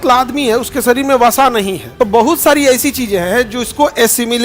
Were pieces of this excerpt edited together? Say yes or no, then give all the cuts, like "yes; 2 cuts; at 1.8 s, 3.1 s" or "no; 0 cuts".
yes; 1 cut; at 1.8 s